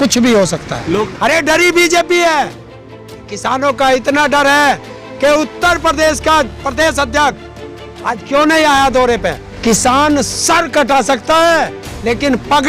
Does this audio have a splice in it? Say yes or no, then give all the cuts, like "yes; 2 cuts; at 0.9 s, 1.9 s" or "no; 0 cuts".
yes; 2 cuts; at 1.1 s, 9.5 s